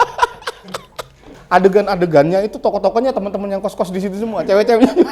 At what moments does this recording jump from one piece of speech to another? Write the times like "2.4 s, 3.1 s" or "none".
1.3 s